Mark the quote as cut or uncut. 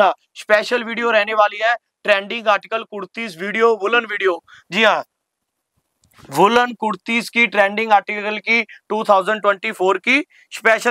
uncut